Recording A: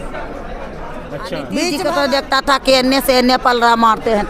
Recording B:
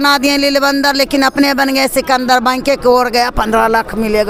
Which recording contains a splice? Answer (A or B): A